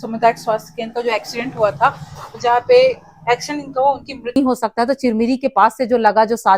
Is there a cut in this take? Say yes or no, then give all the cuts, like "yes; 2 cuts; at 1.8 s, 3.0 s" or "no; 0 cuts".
yes; 1 cut; at 4.4 s